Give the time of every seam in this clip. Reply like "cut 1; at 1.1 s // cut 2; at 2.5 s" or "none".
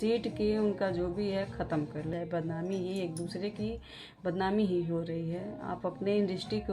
cut 1; at 2.1 s